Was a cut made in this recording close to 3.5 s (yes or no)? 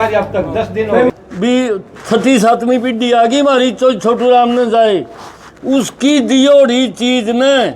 no